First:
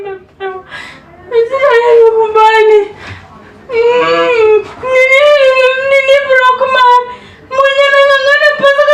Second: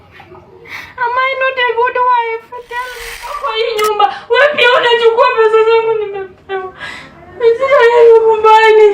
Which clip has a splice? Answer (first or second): second